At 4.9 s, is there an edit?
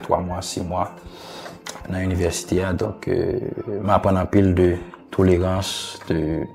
no; 0 cuts

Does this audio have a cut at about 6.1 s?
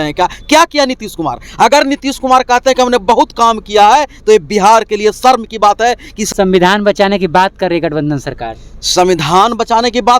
yes; 1 cut; at 6.1 s

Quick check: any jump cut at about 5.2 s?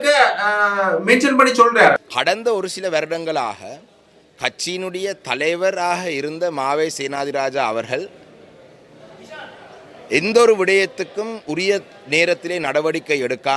no; 1 cut; at 2.1 s

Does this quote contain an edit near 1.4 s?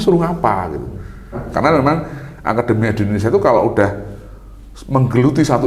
yes; 1 cut; at 1.4 s

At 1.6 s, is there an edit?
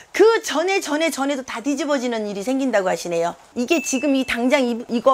no; 1 cut; at 3.4 s

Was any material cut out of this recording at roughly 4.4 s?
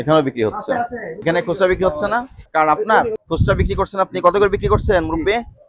no; 2 cuts; at 2.4 s, 3.2 s

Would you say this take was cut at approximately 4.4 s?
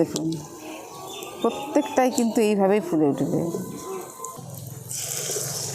yes; 1 cut; at 4.4 s

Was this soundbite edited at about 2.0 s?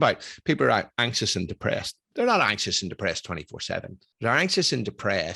yes; 2 cuts; at 2.0 s, 4.0 s

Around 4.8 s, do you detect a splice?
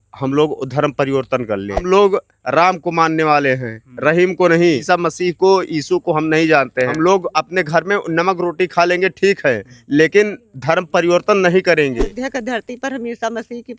yes; 4 cuts; at 1.8 s, 4.8 s, 6.9 s, 12.1 s

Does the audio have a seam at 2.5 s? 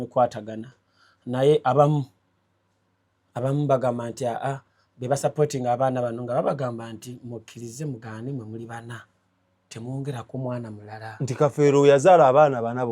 no; 0 cuts

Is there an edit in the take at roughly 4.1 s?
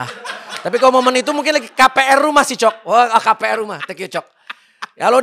no; 0 cuts

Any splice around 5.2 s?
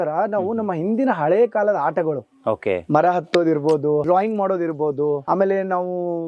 yes; 2 cuts; at 4.0 s, 5.2 s

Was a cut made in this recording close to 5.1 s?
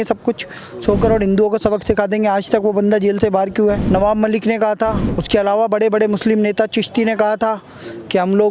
yes; 2 cuts; at 3.8 s, 5.1 s

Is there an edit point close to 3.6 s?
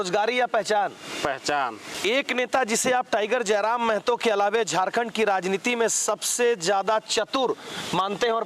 no; 1 cut; at 1.9 s

